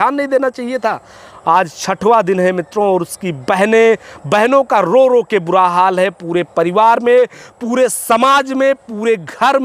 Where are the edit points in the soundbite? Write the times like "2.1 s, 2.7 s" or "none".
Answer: none